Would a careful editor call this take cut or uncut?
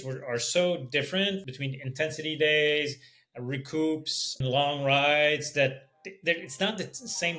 cut